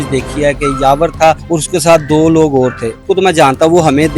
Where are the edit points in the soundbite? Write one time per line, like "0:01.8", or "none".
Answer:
0:01.4
0:03.0